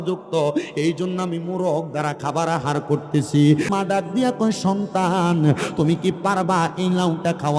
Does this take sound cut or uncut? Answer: cut